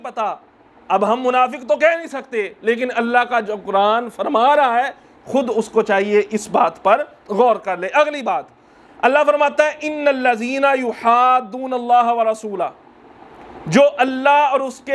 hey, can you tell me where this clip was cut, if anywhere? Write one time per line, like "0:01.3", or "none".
none